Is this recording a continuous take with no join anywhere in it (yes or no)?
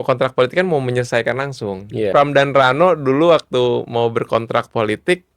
no